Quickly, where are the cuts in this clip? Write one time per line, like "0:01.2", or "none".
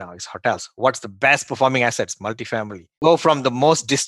0:02.8